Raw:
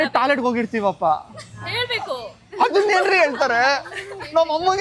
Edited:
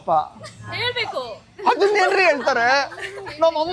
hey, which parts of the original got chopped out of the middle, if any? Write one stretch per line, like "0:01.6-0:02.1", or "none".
none